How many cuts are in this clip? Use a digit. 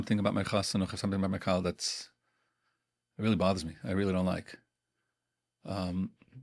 0